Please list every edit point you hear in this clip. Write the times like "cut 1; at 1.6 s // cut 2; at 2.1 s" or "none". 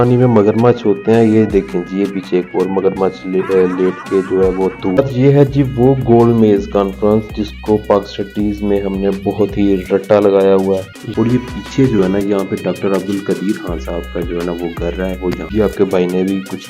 cut 1; at 5.0 s // cut 2; at 11.0 s // cut 3; at 15.5 s